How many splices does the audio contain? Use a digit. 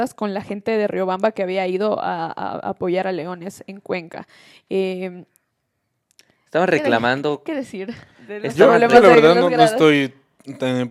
0